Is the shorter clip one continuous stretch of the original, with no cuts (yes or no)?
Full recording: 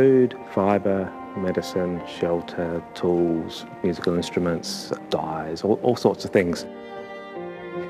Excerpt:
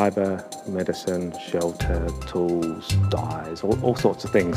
no